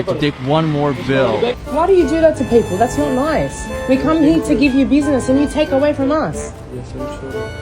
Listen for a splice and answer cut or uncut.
cut